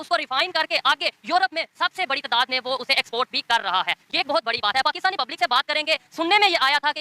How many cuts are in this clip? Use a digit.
0